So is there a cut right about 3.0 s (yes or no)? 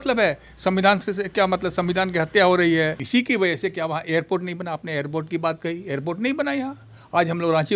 yes